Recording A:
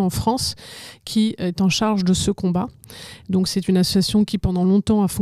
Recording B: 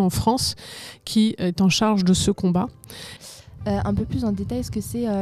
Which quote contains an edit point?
B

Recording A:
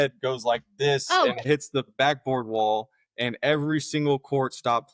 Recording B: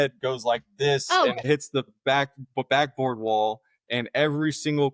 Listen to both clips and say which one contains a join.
A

